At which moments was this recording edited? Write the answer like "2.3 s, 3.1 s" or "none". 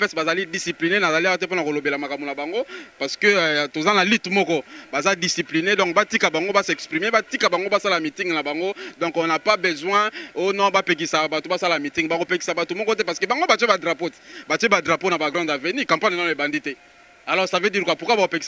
none

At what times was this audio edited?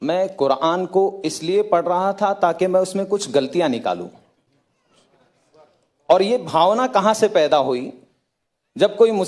none

